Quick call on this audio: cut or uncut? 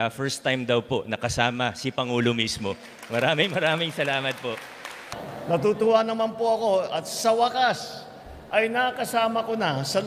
cut